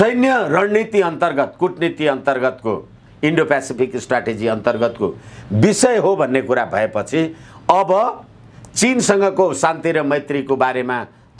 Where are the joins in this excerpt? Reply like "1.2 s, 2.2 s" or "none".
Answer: none